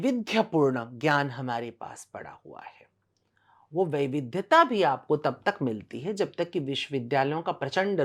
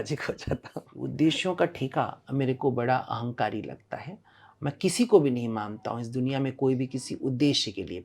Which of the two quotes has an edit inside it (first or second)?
second